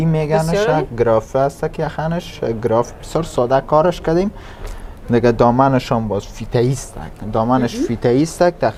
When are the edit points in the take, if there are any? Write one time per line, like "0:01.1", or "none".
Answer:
none

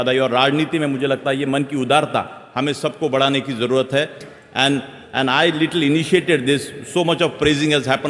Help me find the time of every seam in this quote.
0:04.2

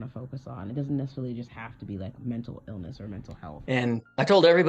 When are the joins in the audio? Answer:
0:03.6

